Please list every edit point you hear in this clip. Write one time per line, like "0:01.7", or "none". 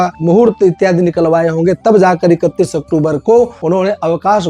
0:03.6